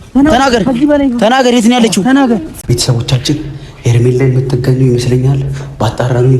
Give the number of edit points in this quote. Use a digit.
1